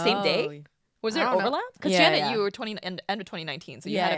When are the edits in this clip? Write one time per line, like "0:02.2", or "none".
0:01.7